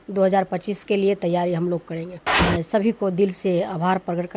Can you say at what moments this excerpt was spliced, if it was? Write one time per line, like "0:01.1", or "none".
0:02.4